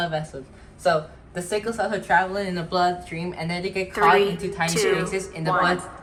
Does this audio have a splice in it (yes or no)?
no